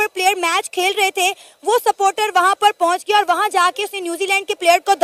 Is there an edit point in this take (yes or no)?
no